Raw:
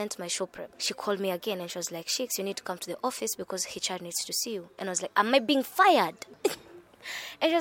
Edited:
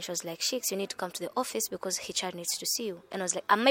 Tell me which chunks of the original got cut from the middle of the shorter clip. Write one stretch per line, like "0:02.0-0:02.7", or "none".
none